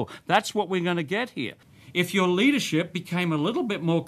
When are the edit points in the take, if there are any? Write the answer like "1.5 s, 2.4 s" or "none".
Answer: 1.6 s